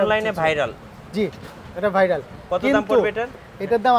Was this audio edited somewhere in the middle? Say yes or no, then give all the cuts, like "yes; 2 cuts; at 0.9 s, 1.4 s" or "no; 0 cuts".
no; 0 cuts